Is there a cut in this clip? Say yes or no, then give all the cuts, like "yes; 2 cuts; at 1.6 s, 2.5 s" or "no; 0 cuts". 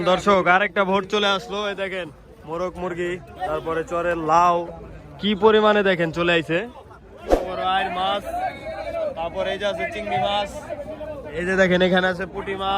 yes; 1 cut; at 7.3 s